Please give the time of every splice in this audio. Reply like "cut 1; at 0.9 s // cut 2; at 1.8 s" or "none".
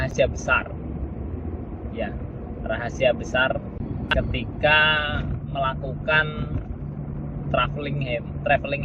none